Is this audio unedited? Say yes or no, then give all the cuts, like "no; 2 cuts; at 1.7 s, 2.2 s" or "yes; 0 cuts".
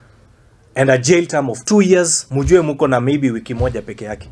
no; 1 cut; at 2.2 s